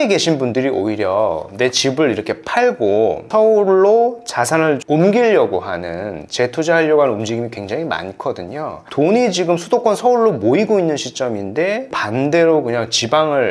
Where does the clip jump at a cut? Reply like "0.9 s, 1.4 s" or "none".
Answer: 3.3 s, 8.8 s, 11.9 s